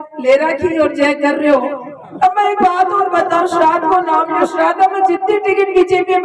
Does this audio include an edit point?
yes; 1 cut; at 2.0 s

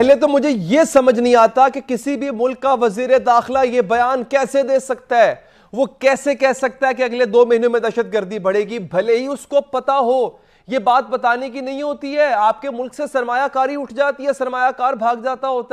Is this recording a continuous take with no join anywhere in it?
yes; 0 cuts

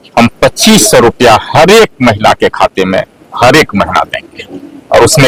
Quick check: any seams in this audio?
no; 0 cuts

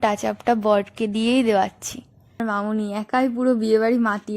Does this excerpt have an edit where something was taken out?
yes; 1 cut; at 2.4 s

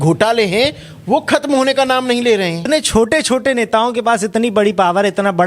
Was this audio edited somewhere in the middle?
yes; 1 cut; at 2.6 s

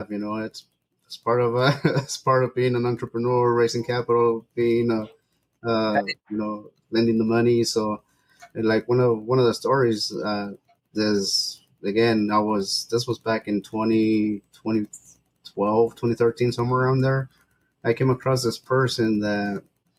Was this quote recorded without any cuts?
yes; 0 cuts

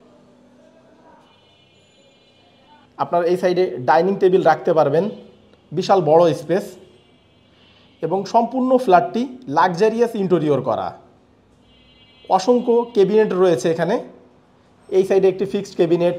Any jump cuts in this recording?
yes; 1 cut; at 2.9 s

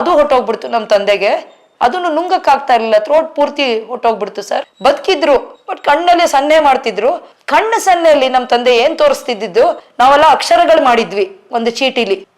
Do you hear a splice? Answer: no; 0 cuts

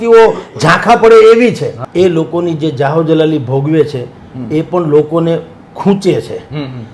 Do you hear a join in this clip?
yes; 1 cut; at 1.7 s

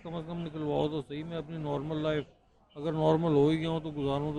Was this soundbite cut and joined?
no; 0 cuts

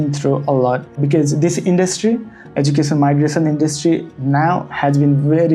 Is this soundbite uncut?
no; 1 cut; at 1.0 s

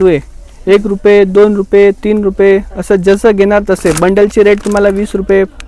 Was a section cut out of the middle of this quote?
no; 0 cuts

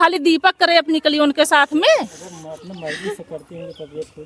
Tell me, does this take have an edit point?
no; 0 cuts

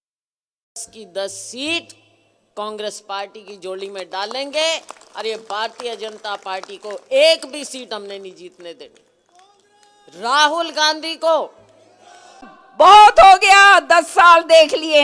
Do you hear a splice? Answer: yes; 1 cut; at 12.6 s

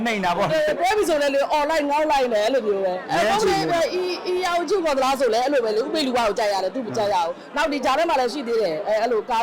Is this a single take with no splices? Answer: no; 1 cut; at 3.0 s

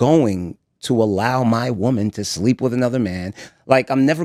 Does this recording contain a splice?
no; 0 cuts

